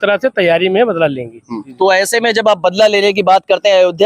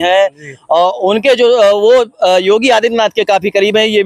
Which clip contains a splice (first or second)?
first